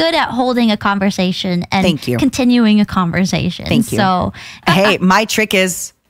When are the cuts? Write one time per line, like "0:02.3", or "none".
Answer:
0:04.6